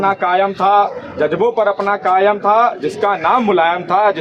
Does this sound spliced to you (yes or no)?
no